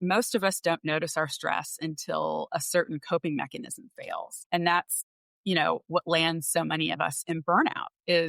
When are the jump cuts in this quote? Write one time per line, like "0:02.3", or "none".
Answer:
0:04.3